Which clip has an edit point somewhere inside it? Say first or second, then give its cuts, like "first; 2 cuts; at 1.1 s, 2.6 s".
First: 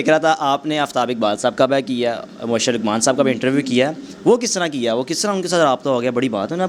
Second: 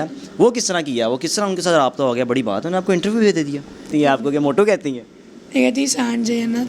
second; 1 cut; at 3.9 s